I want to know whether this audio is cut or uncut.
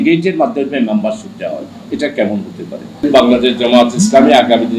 cut